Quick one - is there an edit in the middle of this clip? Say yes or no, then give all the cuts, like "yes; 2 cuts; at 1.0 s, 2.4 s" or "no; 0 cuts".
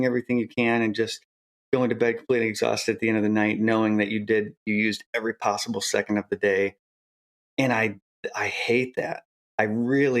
yes; 1 cut; at 9.2 s